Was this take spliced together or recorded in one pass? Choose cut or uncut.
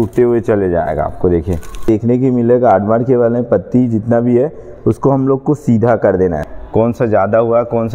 cut